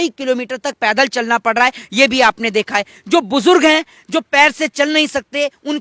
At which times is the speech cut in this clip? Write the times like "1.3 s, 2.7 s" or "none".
none